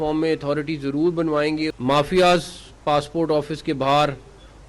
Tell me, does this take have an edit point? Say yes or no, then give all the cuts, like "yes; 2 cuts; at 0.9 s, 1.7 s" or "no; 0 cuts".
yes; 1 cut; at 1.8 s